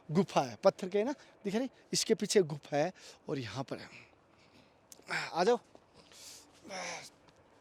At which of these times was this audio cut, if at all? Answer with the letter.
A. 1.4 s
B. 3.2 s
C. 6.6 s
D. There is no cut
D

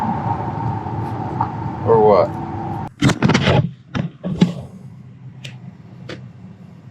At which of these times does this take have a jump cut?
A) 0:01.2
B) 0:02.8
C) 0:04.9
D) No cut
B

